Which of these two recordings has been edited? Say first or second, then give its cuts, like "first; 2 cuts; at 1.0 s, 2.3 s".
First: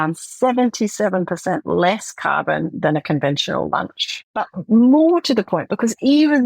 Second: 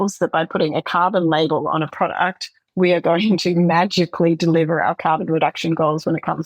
first; 1 cut; at 4.6 s